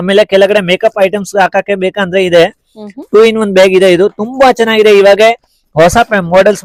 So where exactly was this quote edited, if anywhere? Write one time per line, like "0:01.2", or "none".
none

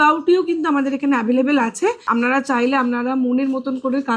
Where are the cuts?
0:02.0

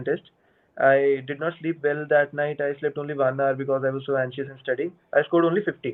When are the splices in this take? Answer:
none

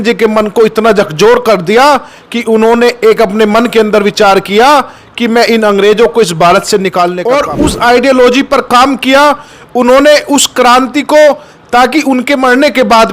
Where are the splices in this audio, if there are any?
0:07.2

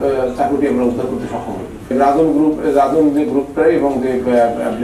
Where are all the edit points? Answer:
0:01.9

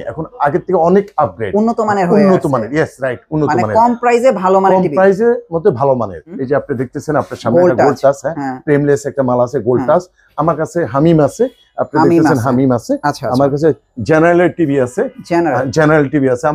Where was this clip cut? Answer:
0:06.3

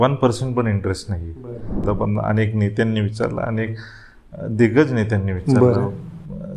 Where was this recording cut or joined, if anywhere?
0:01.8

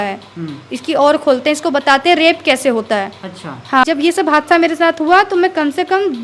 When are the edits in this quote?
0:03.9

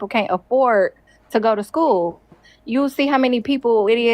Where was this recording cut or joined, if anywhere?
none

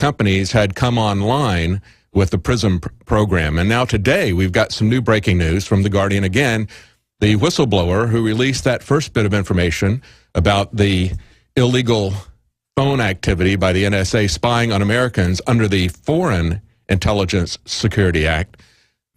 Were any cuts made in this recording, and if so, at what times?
0:10.5

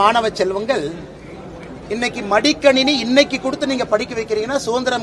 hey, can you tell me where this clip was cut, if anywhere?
none

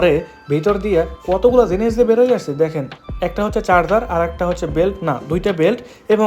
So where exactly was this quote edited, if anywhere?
none

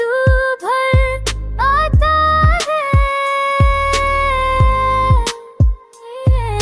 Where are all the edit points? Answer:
0:00.9

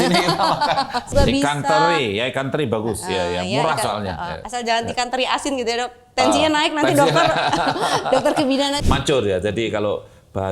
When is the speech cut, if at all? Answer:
0:01.1
0:08.8

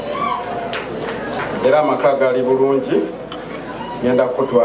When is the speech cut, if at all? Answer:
none

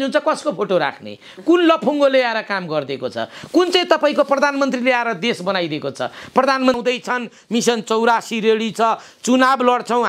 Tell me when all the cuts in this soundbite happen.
0:06.8

